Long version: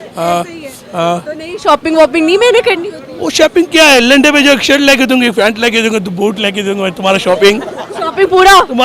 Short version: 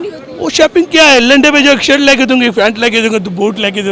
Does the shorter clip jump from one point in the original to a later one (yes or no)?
no